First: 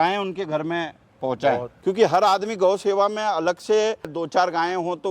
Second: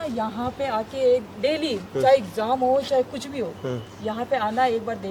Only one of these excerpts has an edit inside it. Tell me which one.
first; 2 cuts; at 1.7 s, 4.2 s

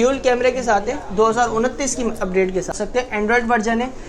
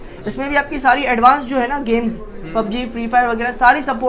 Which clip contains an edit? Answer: first; 1 cut; at 2.7 s

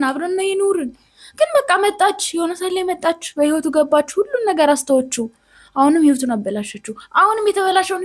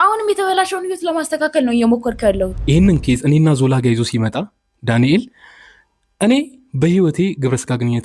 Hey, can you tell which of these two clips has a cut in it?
second; 1 cut; at 2.6 s

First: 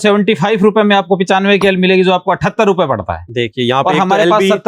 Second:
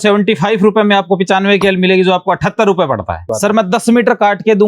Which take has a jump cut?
second; 1 cut; at 3.3 s

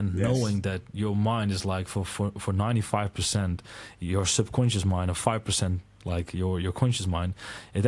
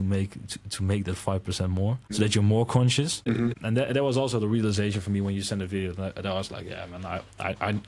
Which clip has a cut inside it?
second; 2 cuts; at 2.0 s, 3.4 s

